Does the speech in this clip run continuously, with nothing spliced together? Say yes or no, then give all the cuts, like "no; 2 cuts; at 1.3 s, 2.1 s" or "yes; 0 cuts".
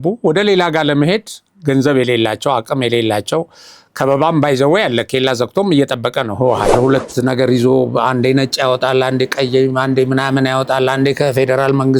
no; 1 cut; at 6.7 s